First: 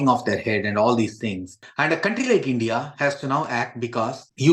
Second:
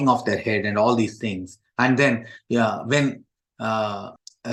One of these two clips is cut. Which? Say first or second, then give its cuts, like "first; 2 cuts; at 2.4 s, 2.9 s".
first; 1 cut; at 1.7 s